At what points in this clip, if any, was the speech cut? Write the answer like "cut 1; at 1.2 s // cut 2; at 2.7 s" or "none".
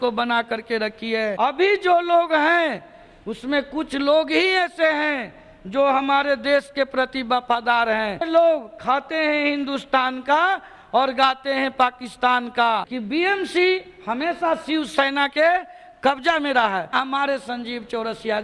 cut 1; at 1.3 s // cut 2; at 8.3 s // cut 3; at 12.9 s // cut 4; at 16.9 s